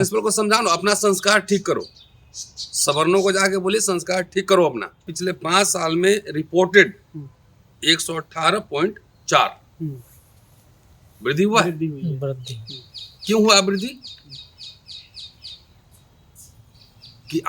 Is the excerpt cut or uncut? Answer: cut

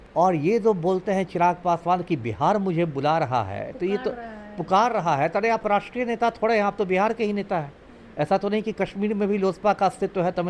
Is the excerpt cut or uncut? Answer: uncut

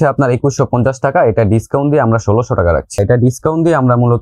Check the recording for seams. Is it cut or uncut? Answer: cut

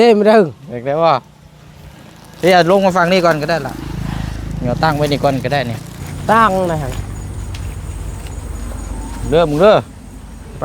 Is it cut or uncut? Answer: cut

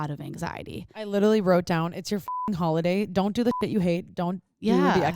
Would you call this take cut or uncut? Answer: uncut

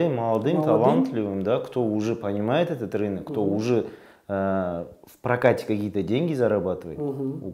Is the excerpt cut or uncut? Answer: uncut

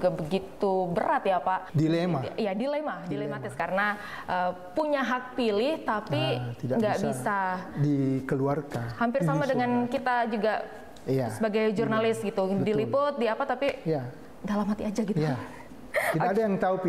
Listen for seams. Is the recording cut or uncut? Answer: cut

